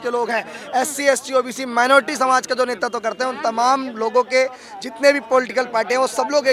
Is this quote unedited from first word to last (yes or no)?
yes